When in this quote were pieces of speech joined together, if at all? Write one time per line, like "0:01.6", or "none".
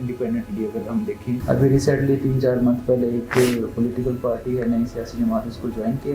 0:01.4